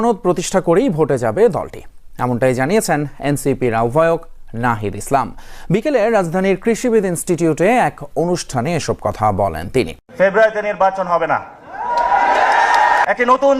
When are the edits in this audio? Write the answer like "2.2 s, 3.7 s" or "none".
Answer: 10.0 s